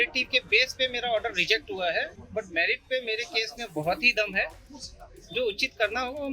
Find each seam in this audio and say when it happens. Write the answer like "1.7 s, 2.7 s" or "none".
none